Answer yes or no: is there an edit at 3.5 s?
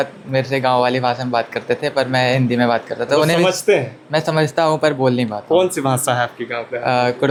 no